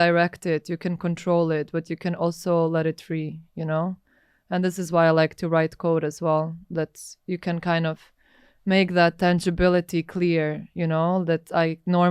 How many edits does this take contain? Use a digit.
0